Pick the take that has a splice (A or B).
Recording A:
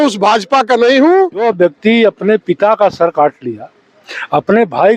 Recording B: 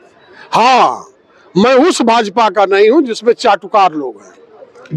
A